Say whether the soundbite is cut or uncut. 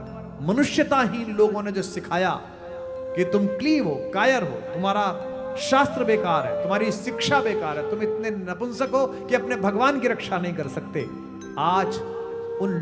uncut